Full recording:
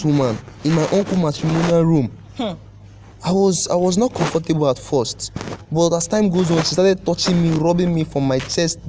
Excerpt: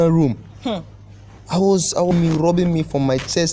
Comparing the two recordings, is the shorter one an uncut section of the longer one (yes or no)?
no